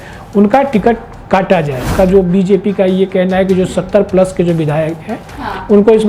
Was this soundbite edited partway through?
yes; 1 cut; at 1.8 s

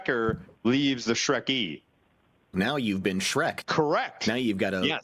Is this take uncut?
no; 2 cuts; at 2.5 s, 3.7 s

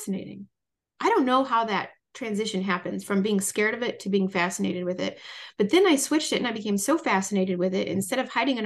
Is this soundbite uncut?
yes; 0 cuts

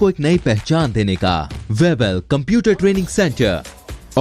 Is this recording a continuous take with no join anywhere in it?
no; 1 cut; at 1.5 s

